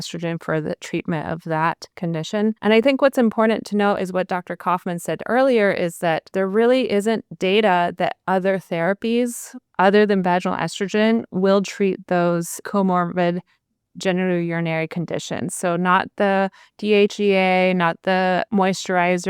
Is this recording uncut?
no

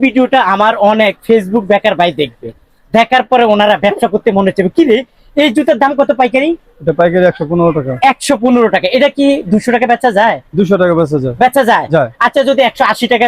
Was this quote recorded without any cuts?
yes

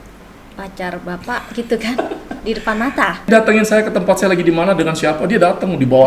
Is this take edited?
yes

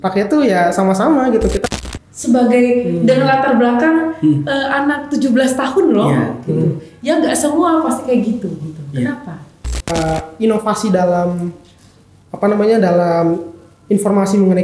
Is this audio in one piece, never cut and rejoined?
no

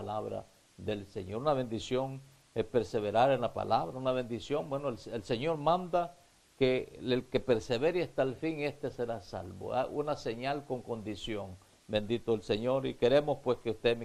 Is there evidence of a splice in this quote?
no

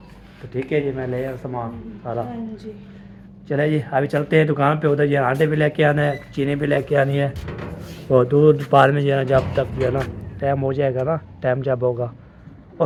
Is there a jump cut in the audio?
no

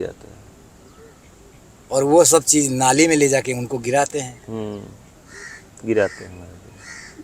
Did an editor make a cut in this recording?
no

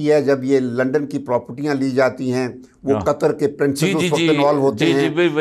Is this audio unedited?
yes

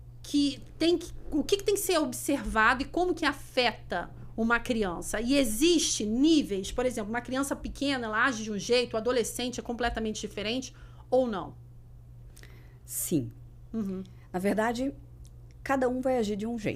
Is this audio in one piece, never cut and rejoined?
yes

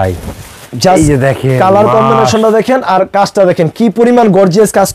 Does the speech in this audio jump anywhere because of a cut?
no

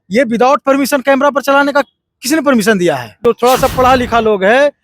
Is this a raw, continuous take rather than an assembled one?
no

